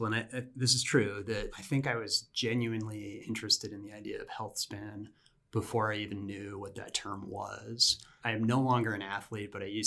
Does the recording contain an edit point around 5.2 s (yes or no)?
no